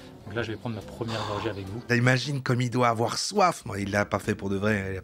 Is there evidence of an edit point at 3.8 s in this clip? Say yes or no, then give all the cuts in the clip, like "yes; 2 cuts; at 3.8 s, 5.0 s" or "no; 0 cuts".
no; 1 cut; at 1.9 s